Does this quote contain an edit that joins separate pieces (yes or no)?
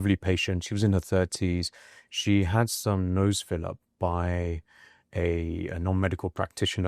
no